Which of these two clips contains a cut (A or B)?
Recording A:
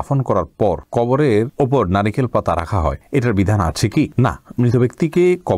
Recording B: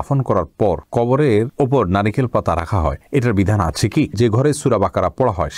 B